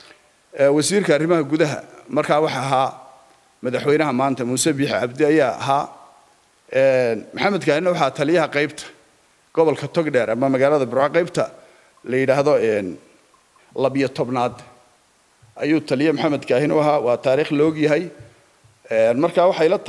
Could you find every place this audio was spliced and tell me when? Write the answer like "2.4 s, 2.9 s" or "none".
none